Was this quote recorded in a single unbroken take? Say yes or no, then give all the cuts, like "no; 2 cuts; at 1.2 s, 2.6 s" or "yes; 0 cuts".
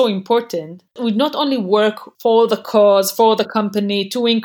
no; 2 cuts; at 1.0 s, 2.1 s